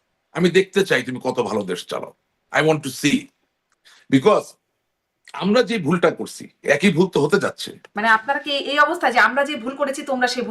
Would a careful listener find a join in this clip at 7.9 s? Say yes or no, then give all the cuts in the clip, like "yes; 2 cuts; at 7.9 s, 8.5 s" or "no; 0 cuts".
yes; 1 cut; at 7.9 s